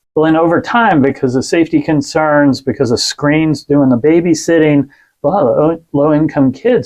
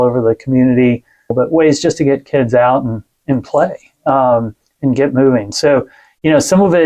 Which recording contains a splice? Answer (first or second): second